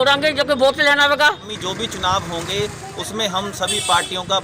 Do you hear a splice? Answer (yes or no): yes